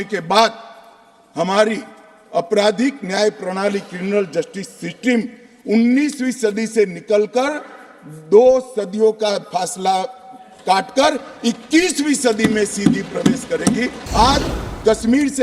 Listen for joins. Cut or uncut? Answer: cut